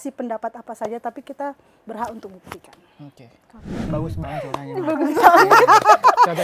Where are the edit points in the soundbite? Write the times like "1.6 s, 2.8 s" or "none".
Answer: 3.9 s